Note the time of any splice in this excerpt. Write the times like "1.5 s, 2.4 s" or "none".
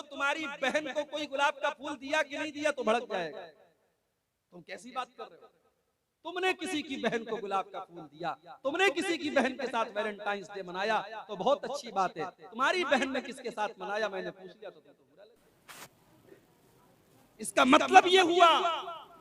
none

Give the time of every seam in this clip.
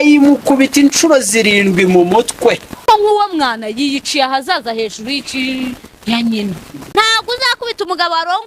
2.8 s, 6.7 s

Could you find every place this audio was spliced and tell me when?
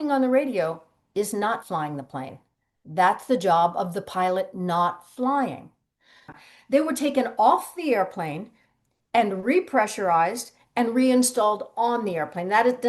6.3 s

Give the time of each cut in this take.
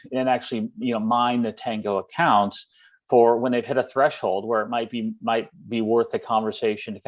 none

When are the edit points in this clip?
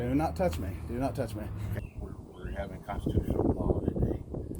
1.8 s

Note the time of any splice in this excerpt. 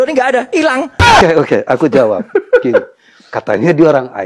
1.2 s

